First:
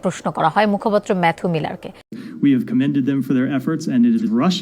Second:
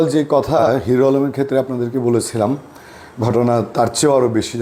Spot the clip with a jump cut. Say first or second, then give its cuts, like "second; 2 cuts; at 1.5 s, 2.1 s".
first; 1 cut; at 2.2 s